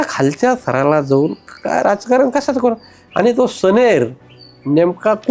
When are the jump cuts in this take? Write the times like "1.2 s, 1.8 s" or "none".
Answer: none